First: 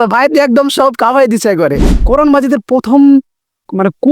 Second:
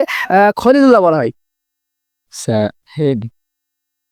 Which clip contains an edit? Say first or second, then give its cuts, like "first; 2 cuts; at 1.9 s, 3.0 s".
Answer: first; 1 cut; at 1.9 s